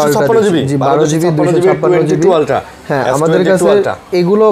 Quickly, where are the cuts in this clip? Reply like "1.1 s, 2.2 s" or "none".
none